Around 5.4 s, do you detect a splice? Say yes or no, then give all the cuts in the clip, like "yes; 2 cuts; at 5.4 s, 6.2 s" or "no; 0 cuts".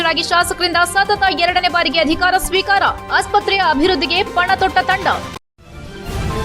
yes; 1 cut; at 5.4 s